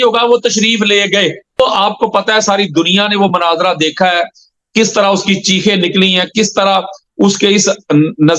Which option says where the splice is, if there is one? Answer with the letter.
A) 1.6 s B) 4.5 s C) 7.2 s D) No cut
A